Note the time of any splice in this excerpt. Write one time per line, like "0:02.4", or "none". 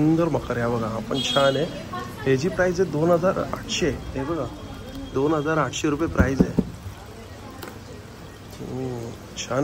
none